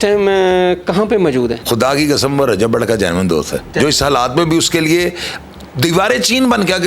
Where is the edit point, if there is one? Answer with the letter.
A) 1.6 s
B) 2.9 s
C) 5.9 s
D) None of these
A